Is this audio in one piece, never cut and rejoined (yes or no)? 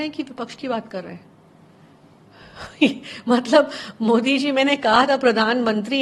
yes